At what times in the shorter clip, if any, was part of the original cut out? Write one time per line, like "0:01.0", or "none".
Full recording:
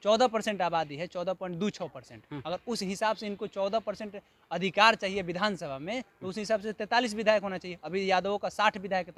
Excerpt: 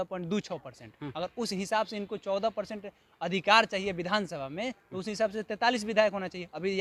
none